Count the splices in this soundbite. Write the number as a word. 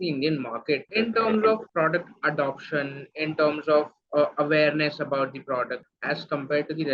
three